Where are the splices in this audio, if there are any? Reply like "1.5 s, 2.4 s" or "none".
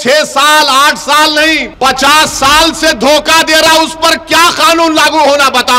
1.7 s

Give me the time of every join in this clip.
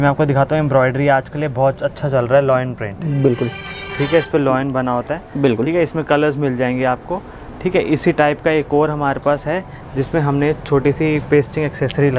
none

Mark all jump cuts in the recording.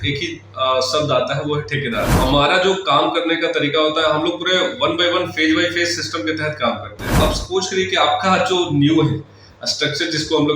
2.1 s, 7.0 s

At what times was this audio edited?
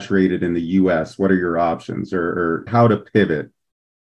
2.7 s

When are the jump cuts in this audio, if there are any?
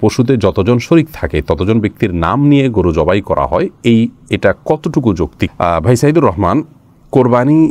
none

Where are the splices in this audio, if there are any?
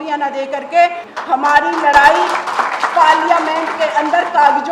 1.0 s

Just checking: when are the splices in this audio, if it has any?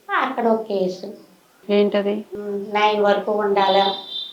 none

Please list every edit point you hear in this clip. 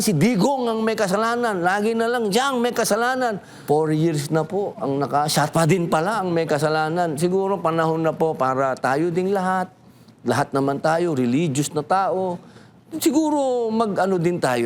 3.6 s

